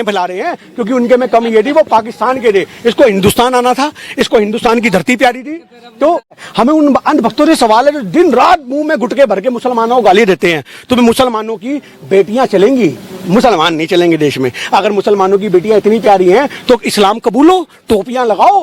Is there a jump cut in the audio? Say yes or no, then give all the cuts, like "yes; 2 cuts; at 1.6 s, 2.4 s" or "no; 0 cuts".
yes; 1 cut; at 6.5 s